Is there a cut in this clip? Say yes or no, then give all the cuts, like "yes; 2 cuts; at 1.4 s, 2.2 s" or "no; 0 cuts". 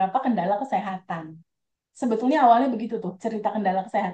no; 0 cuts